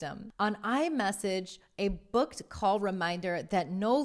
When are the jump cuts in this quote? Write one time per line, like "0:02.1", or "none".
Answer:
none